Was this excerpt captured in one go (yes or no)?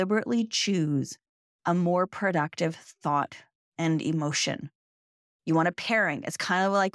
yes